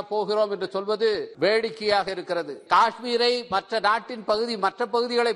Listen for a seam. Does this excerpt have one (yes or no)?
yes